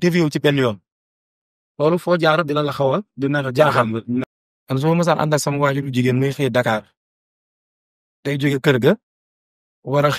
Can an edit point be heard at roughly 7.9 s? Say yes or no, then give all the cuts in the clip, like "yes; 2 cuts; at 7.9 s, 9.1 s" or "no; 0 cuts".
no; 1 cut; at 4.2 s